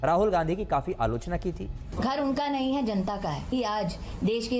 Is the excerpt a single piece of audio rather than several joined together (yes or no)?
no